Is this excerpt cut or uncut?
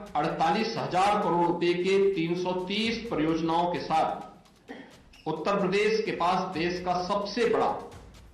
uncut